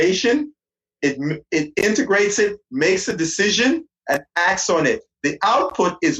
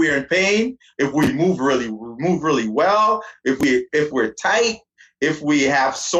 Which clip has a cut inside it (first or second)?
first